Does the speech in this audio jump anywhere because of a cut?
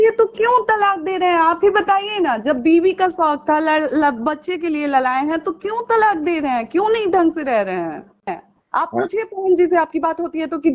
yes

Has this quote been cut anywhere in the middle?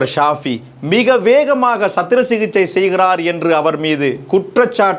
no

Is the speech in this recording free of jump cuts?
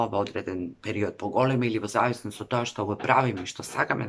yes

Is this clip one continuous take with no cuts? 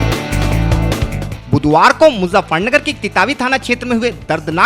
yes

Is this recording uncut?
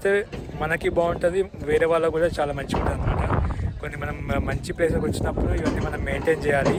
yes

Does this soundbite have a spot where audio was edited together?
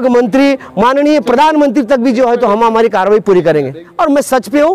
yes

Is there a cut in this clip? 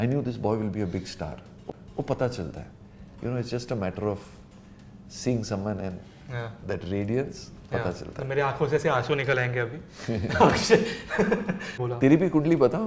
no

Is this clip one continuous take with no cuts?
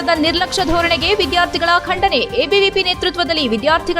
yes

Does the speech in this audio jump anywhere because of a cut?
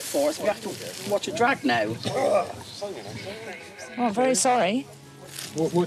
no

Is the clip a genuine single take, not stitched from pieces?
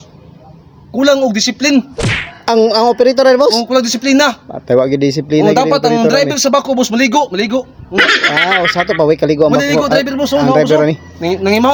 yes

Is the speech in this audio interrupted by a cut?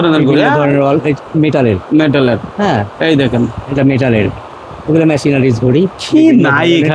no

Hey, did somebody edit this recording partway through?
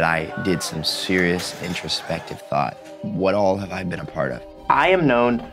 yes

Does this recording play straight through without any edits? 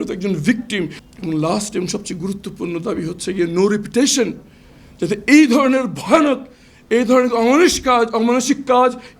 no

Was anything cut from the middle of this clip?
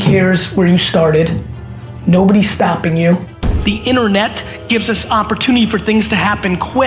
yes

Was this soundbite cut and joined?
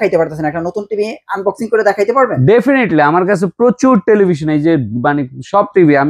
no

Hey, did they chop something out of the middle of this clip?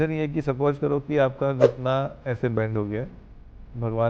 no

